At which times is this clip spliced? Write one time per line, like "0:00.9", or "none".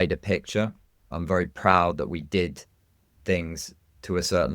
0:01.0